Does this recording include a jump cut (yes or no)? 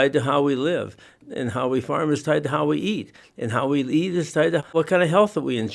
yes